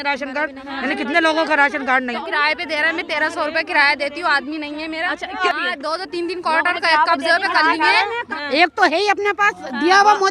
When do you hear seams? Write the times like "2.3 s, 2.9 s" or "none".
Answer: 2.2 s, 5.4 s, 8.2 s